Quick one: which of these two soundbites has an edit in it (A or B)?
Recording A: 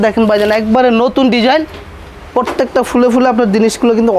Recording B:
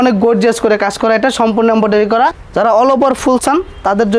B